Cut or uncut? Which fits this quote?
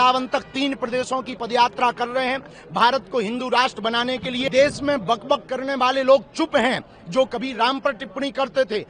cut